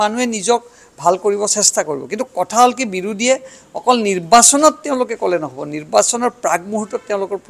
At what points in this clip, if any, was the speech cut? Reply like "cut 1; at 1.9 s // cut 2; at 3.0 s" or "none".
none